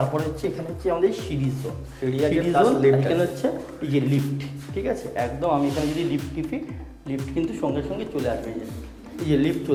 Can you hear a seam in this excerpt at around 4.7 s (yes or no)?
no